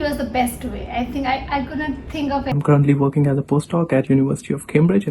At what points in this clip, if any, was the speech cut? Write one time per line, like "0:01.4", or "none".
0:02.5